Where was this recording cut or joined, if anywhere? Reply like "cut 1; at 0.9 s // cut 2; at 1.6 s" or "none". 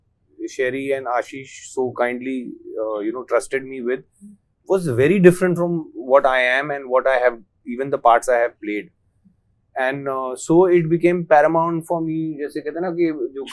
none